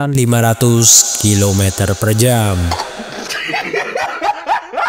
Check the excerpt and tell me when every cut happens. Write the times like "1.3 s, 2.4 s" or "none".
none